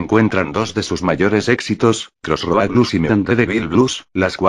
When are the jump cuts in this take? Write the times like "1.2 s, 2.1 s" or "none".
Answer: 1.0 s